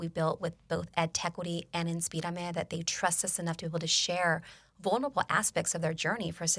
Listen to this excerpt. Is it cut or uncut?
uncut